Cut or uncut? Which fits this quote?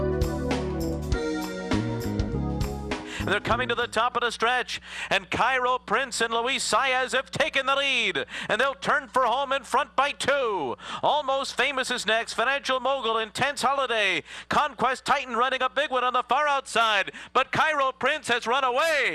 cut